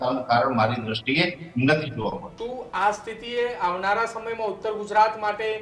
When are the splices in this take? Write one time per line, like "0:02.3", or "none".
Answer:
0:02.3